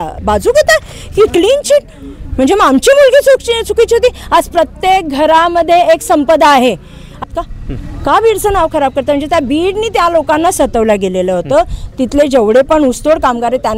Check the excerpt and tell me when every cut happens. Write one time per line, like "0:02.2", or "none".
0:07.1